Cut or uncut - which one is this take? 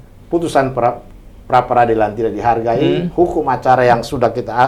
uncut